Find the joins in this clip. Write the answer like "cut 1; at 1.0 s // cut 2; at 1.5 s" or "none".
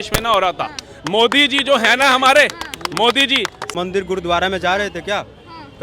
cut 1; at 3.7 s